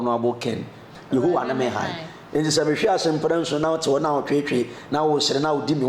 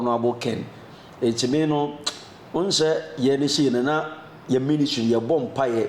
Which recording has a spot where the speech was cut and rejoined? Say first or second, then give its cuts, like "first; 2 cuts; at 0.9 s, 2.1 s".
first; 1 cut; at 0.9 s